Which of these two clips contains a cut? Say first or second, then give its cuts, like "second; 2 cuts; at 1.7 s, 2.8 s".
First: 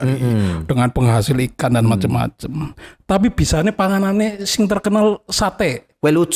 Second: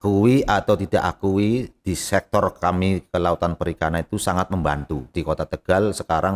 second; 1 cut; at 5.2 s